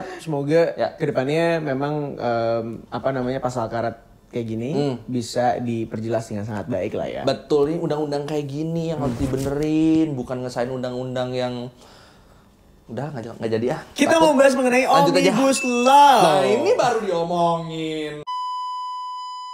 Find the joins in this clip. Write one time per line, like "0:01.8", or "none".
0:18.3